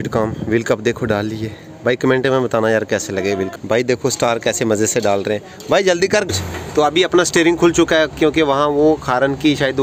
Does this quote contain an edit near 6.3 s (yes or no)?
yes